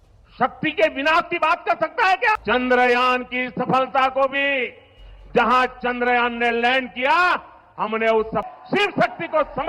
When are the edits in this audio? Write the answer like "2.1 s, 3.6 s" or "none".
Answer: 2.4 s, 8.4 s